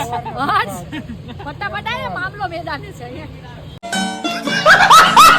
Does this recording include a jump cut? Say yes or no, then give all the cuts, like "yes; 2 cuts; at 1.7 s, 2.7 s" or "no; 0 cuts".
no; 0 cuts